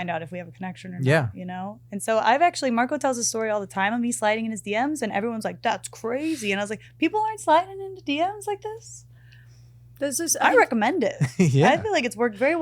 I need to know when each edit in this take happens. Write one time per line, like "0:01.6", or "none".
none